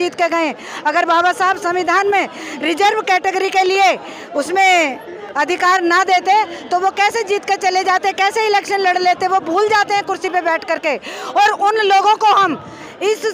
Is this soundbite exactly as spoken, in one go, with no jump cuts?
yes; 0 cuts

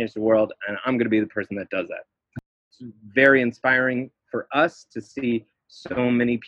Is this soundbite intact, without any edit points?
no; 1 cut; at 2.5 s

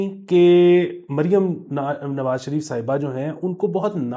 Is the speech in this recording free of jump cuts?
yes; 0 cuts

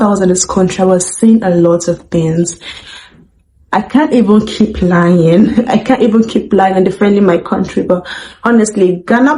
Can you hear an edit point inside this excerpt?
no; 0 cuts

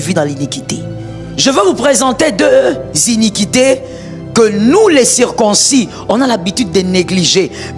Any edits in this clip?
yes; 1 cut; at 1.0 s

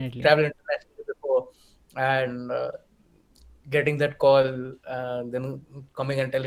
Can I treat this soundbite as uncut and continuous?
yes; 0 cuts

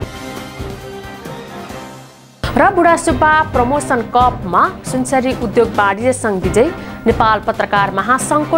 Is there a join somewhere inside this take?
no; 0 cuts

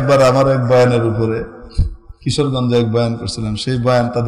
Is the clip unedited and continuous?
yes; 0 cuts

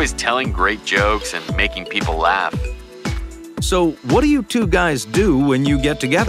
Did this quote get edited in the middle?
yes; 1 cut; at 5.4 s

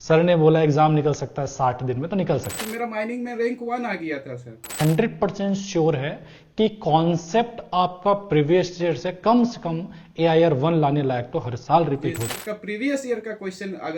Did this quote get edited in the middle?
yes; 3 cuts; at 2.6 s, 4.8 s, 12.4 s

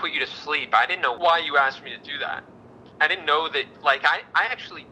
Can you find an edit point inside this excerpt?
yes; 1 cut; at 1.2 s

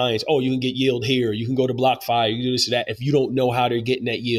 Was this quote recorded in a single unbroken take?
yes; 0 cuts

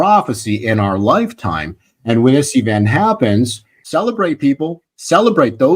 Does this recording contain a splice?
yes; 1 cut; at 3.7 s

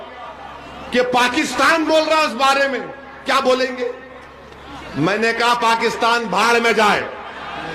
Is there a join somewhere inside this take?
no; 0 cuts

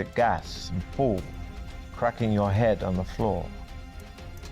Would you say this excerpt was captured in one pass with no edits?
no; 1 cut; at 3.5 s

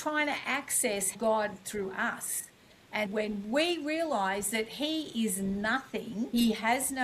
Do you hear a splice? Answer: yes; 3 cuts; at 1.1 s, 3.1 s, 6.3 s

